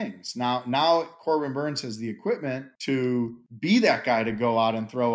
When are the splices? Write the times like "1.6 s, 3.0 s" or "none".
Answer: 2.7 s, 3.4 s